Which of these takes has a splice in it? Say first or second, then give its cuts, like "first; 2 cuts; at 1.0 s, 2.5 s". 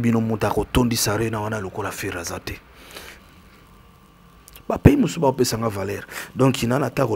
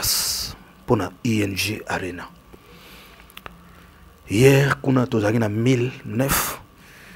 first; 1 cut; at 3.1 s